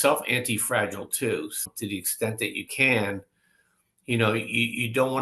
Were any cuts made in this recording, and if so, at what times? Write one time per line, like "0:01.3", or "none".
0:01.6